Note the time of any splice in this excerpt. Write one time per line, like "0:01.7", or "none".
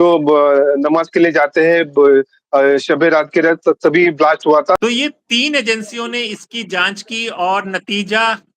0:04.8